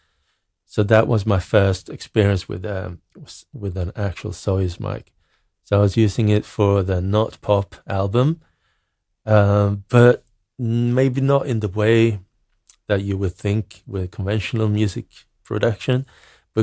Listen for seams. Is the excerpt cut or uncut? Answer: uncut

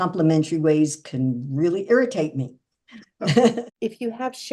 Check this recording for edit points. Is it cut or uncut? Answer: cut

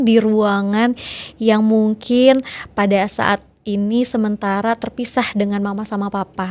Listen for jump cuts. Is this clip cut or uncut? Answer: uncut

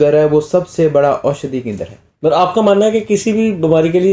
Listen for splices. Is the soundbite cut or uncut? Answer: cut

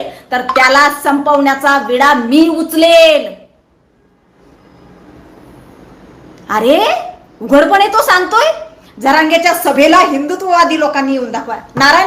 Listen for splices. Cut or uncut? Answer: uncut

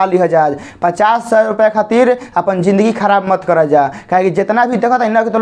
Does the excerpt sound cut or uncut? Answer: uncut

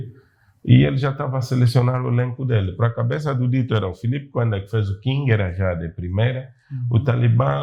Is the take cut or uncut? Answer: uncut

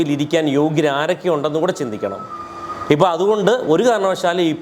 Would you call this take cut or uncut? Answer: uncut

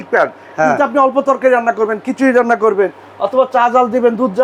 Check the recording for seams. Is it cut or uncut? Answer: uncut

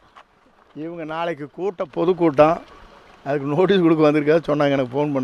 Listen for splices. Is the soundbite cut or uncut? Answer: uncut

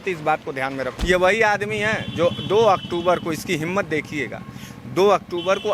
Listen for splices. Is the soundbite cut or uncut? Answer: cut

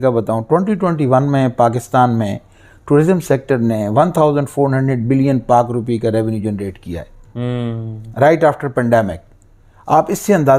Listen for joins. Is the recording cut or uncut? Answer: uncut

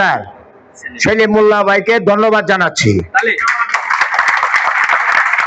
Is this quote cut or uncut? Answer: uncut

